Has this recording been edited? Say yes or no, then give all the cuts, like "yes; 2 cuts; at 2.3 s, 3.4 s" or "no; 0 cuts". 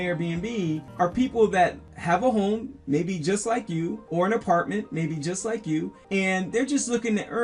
yes; 4 cuts; at 0.9 s, 1.9 s, 4.0 s, 6.0 s